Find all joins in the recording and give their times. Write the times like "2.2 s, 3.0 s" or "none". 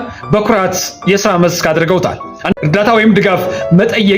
2.5 s